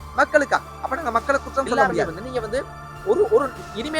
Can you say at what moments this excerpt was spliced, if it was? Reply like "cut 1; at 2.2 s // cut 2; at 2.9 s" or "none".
cut 1; at 1.8 s